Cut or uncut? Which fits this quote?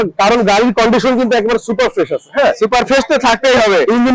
uncut